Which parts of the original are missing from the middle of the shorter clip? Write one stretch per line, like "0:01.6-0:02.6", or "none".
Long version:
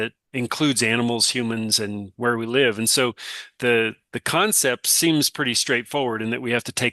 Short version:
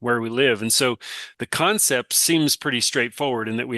0:03.5-0:04.0